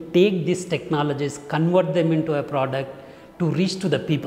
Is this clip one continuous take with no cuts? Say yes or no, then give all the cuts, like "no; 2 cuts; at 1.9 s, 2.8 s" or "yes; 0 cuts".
yes; 0 cuts